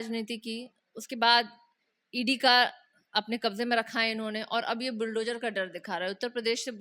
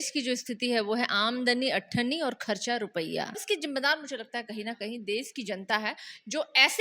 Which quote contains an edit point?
second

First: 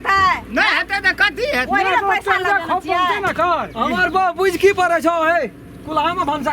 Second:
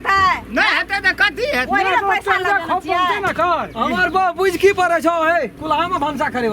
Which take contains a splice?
second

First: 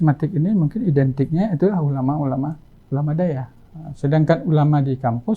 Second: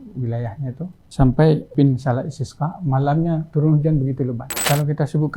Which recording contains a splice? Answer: second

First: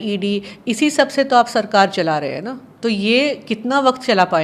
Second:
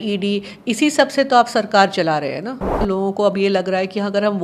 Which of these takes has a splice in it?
second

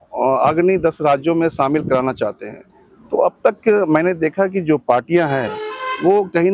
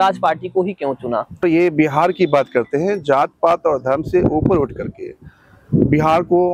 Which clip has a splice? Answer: second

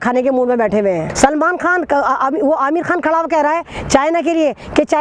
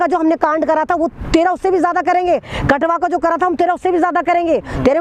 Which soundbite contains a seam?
first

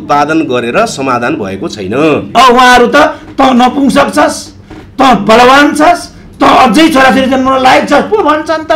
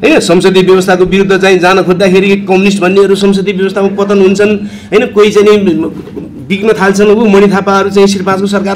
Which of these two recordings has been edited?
first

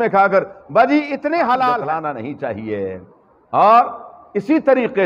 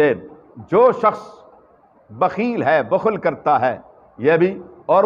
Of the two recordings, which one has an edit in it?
first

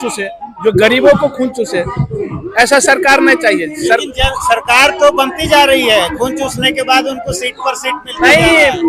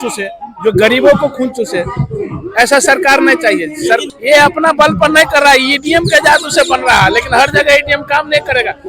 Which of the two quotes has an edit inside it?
second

